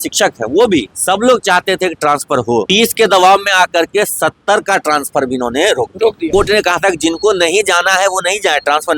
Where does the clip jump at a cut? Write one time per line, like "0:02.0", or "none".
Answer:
0:00.9
0:02.7
0:06.3